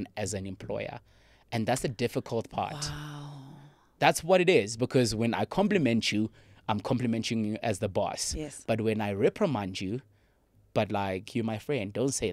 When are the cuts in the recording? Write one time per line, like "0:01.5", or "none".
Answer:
none